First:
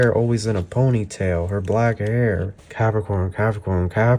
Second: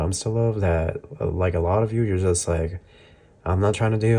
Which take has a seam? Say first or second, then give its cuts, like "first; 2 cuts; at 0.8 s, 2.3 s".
first; 1 cut; at 2.6 s